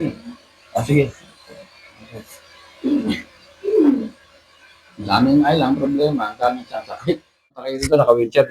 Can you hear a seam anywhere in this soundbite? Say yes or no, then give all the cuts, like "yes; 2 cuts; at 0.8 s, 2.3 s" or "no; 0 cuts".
yes; 1 cut; at 7.6 s